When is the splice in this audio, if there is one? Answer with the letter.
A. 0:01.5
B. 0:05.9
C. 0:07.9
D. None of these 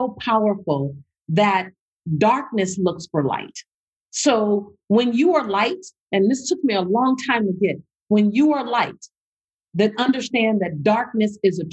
D